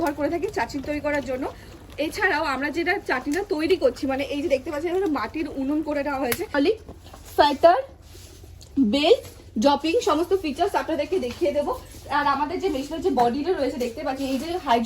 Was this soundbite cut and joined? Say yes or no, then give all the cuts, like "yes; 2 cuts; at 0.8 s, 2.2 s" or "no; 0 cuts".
yes; 1 cut; at 6.5 s